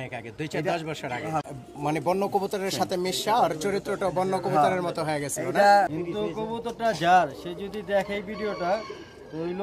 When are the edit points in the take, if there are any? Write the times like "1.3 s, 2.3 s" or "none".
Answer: 1.5 s, 5.9 s